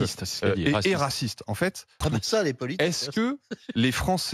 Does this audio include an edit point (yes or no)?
yes